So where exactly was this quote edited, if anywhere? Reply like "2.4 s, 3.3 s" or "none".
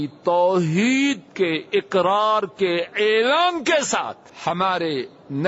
4.2 s